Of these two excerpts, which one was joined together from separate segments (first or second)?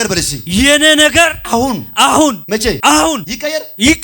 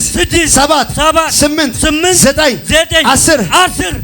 first